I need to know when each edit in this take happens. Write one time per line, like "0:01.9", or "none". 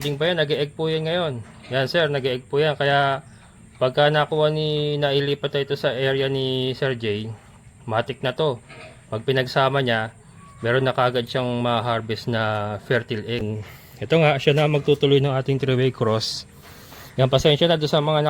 0:13.4

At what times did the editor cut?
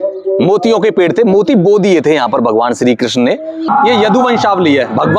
0:03.7

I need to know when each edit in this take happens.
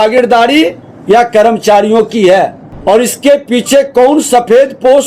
0:02.7

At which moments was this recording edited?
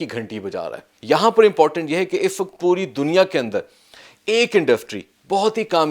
0:00.9

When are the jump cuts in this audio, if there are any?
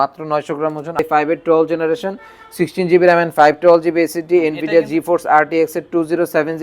0:01.0

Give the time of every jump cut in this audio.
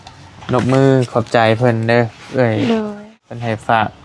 0:03.1

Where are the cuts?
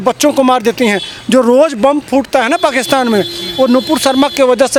none

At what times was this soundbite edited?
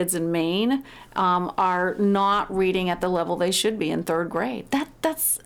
none

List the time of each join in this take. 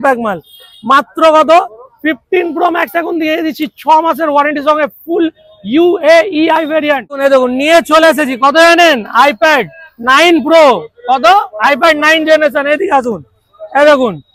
0:07.3

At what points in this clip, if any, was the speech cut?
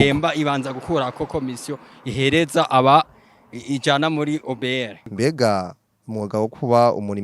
0:05.0

